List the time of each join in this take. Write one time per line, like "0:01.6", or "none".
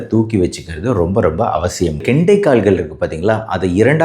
0:02.0